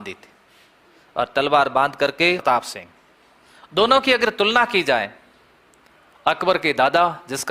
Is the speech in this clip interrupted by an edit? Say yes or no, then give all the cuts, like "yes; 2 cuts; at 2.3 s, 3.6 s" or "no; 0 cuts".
yes; 1 cut; at 2.4 s